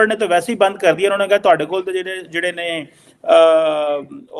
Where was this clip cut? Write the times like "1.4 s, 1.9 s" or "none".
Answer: none